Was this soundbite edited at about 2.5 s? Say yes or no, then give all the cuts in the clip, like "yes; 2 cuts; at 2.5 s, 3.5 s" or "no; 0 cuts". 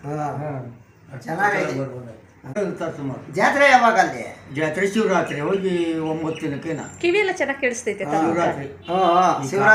yes; 1 cut; at 2.5 s